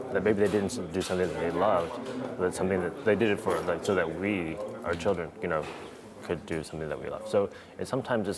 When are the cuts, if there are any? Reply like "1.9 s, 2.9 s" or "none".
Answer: none